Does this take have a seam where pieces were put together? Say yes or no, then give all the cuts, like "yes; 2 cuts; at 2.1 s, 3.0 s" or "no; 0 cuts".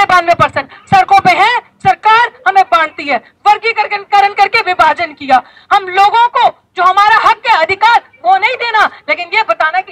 no; 0 cuts